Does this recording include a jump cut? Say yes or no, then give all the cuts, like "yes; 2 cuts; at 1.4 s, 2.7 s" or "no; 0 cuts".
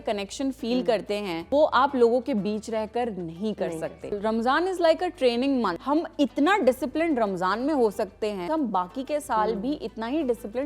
yes; 4 cuts; at 1.4 s, 4.2 s, 5.8 s, 8.5 s